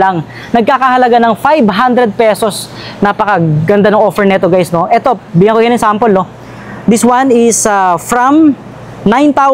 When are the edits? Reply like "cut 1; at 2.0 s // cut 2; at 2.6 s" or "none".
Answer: none